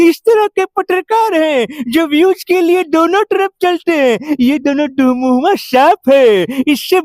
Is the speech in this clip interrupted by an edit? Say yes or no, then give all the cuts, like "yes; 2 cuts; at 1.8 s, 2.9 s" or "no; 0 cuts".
no; 0 cuts